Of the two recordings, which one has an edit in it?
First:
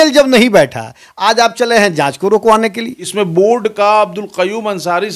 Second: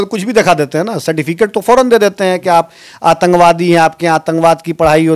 first; 1 cut; at 3.0 s

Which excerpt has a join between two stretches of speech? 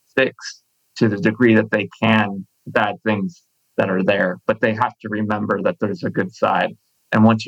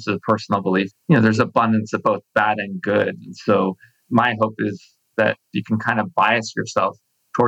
second; 2 cuts; at 0.9 s, 5.5 s

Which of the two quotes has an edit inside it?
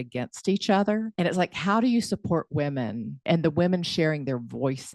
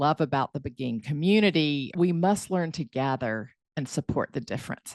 first; 2 cuts; at 1.1 s, 3.2 s

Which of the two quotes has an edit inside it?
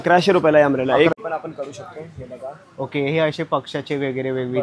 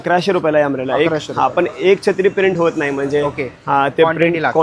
first; 1 cut; at 1.1 s

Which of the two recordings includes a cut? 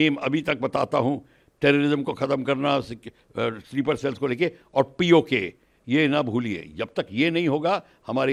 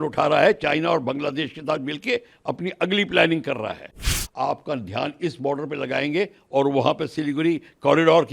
second; 1 cut; at 4.1 s

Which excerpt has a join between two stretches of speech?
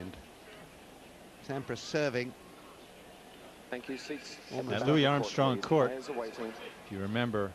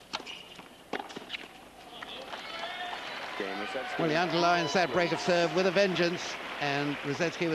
first; 1 cut; at 5.7 s

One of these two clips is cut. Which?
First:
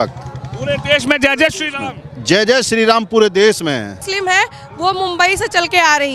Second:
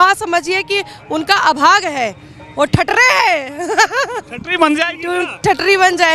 first; 1 cut; at 4.0 s

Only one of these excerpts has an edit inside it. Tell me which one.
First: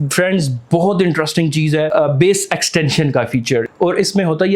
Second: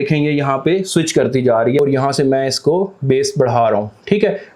first; 2 cuts; at 1.9 s, 3.7 s

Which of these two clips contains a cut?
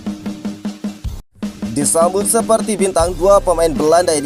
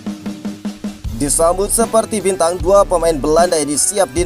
second; 1 cut; at 1.1 s

